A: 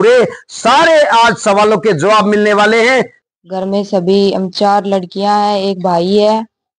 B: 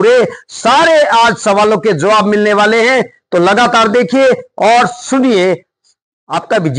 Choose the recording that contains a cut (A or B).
A